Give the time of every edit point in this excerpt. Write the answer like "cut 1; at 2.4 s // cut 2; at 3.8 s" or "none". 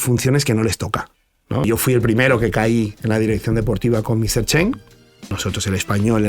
cut 1; at 1.7 s // cut 2; at 5.3 s